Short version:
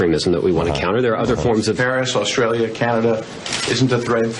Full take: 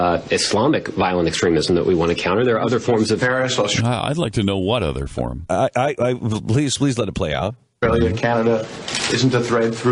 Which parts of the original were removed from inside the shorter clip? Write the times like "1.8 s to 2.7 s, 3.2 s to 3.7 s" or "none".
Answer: 3.7 s to 7.7 s